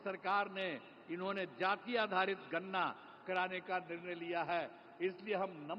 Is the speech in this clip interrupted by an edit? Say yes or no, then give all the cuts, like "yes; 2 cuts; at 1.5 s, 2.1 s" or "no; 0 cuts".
no; 0 cuts